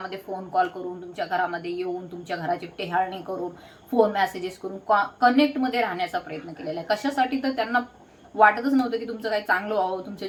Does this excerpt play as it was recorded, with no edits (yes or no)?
yes